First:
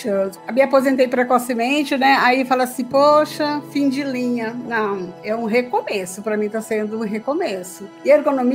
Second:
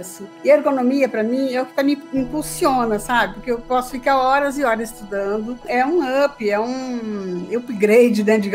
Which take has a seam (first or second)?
second